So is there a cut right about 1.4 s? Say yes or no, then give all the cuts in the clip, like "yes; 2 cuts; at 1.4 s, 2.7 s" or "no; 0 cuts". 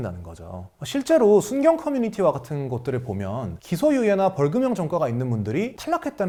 no; 0 cuts